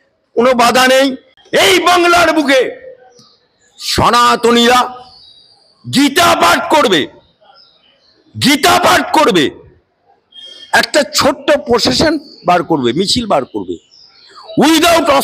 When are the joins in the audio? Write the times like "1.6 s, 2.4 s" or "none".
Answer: 1.3 s

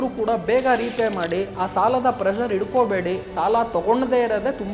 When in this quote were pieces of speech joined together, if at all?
none

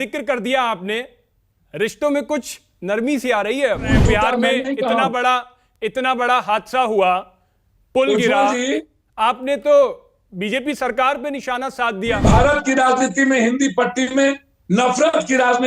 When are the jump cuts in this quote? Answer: 3.9 s, 12.2 s

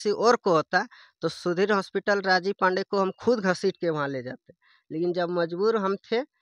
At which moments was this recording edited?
none

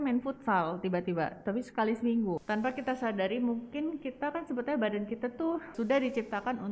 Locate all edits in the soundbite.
2.4 s, 5.7 s

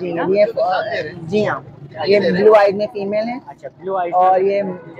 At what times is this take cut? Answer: none

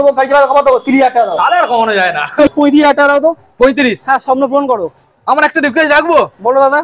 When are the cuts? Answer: 2.5 s

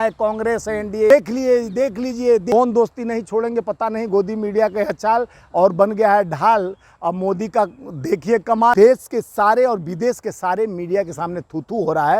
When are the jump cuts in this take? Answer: 1.1 s, 2.5 s, 8.7 s

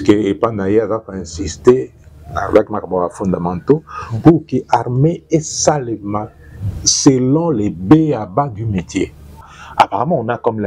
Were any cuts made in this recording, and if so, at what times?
9.6 s

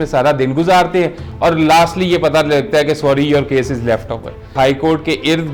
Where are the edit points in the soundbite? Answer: 4.5 s

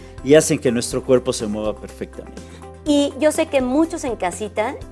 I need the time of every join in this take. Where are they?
none

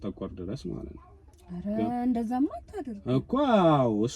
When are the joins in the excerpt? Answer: none

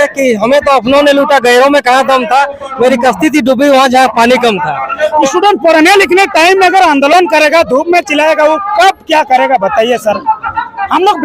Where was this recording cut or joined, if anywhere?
5.3 s

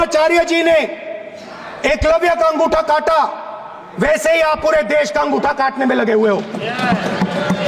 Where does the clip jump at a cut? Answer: none

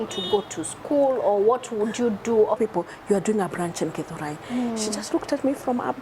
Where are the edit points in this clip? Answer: 2.6 s

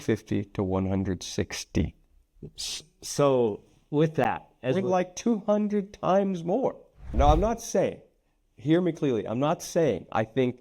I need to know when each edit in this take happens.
7.1 s

